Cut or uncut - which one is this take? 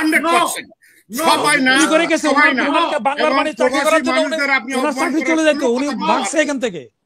uncut